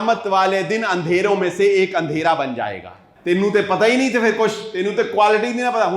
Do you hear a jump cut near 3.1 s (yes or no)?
yes